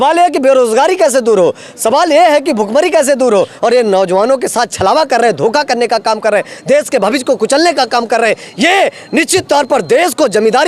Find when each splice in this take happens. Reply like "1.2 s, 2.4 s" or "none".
3.5 s

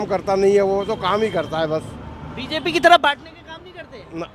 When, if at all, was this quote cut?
none

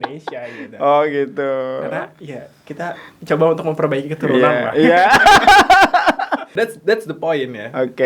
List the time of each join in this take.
6.5 s

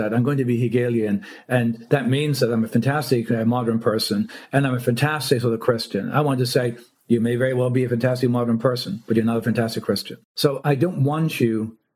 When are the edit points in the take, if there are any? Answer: 10.6 s

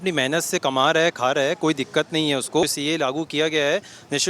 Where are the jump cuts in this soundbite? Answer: 2.6 s

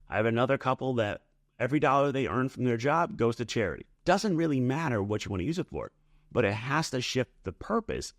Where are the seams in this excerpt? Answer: 3.9 s

